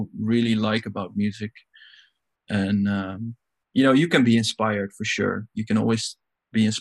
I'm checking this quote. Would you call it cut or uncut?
uncut